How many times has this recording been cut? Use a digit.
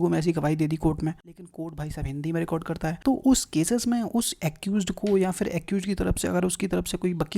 2